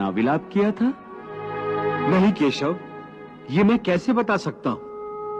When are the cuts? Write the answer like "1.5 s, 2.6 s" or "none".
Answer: none